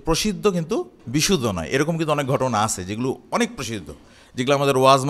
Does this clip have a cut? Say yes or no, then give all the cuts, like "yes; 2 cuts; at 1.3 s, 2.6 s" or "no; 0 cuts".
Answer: yes; 1 cut; at 1.0 s